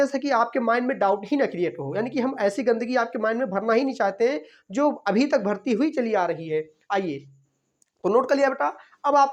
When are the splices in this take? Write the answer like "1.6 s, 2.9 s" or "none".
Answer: none